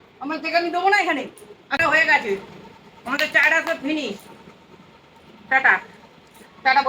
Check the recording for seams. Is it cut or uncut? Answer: cut